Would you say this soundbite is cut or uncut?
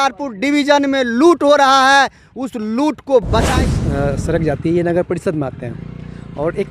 cut